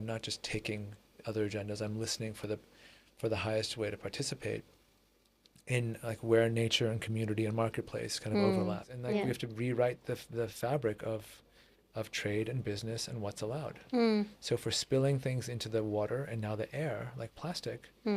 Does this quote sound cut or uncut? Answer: cut